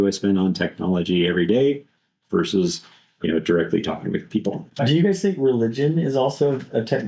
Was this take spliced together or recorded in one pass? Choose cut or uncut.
cut